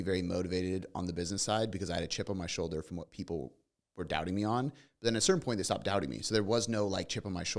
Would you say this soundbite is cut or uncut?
uncut